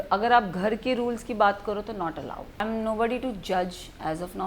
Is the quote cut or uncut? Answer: cut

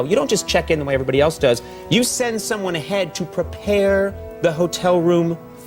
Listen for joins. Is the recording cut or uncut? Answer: uncut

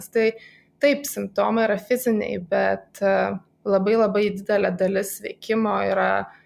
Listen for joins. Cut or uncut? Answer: uncut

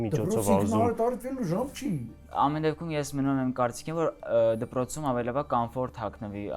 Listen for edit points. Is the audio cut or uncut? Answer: cut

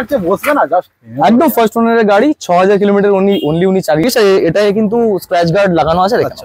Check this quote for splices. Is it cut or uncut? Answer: cut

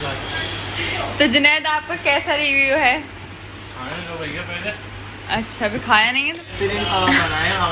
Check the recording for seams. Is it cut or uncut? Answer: cut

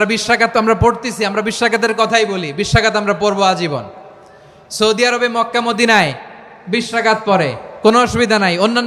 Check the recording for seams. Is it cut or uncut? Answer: uncut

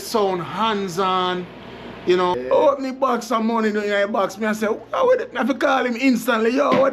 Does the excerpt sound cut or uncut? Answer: cut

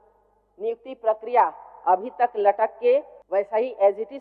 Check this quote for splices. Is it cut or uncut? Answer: cut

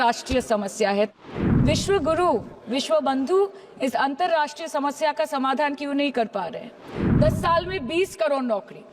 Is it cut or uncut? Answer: cut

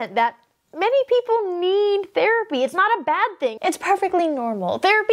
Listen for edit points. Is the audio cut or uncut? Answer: cut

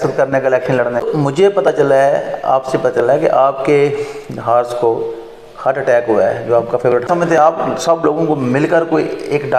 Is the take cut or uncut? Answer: cut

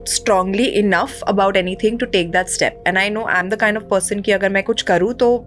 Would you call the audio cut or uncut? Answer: uncut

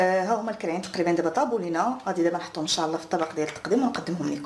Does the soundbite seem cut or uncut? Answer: uncut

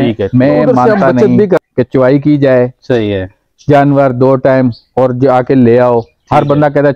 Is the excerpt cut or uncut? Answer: cut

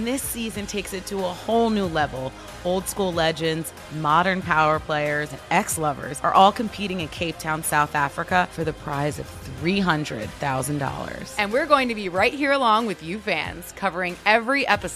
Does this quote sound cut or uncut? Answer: uncut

